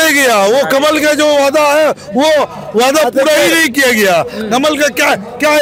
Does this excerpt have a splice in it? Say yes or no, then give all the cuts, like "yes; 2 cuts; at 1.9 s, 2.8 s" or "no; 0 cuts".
no; 0 cuts